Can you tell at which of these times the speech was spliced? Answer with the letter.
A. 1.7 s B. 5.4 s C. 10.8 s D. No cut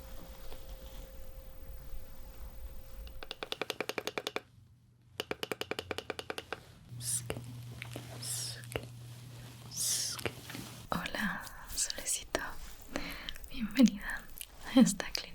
C